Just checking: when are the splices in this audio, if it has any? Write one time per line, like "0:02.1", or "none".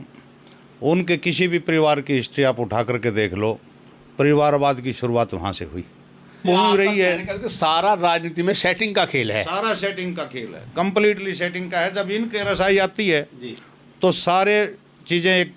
0:06.4